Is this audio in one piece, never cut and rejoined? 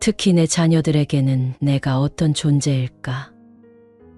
no; 1 cut; at 3.3 s

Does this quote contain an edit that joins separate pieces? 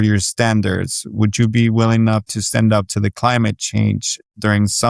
no; 0 cuts

